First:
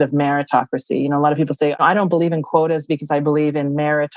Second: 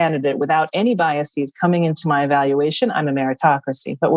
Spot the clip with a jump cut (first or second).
first